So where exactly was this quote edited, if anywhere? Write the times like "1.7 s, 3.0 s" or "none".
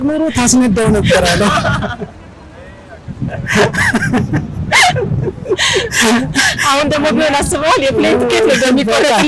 none